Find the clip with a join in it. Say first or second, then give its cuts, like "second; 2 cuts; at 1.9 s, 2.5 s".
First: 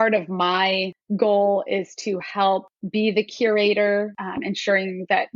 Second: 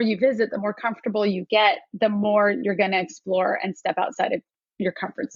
first; 3 cuts; at 1.0 s, 2.8 s, 4.2 s